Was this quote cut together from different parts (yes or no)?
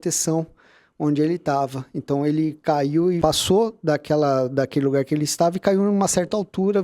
yes